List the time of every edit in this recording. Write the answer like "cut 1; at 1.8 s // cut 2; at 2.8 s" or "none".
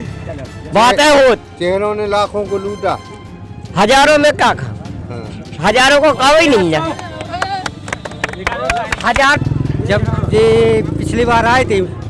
cut 1; at 9.4 s

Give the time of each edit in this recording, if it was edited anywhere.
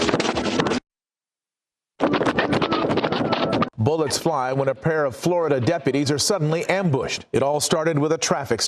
cut 1; at 7.0 s

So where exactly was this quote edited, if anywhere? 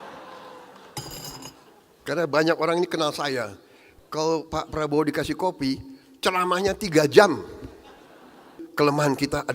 cut 1; at 8.5 s

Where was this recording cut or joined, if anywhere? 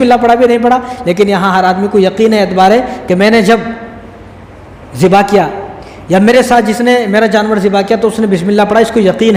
none

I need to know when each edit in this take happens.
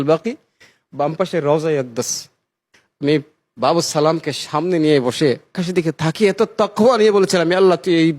cut 1; at 5.6 s

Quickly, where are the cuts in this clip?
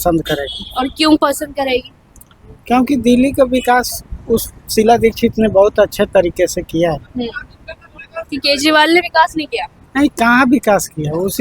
none

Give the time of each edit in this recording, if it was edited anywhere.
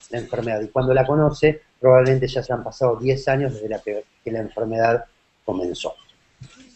cut 1; at 4.4 s

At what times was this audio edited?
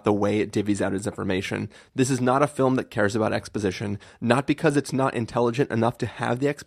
none

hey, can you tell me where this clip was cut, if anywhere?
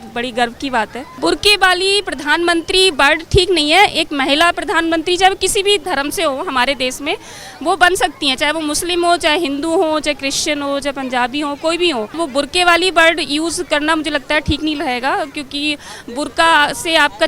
cut 1; at 1.2 s // cut 2; at 5.9 s // cut 3; at 12.2 s

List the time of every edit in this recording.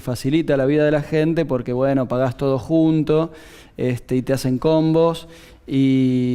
cut 1; at 1.1 s

